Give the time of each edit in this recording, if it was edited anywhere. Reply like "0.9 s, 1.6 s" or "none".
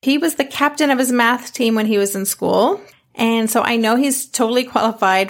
2.9 s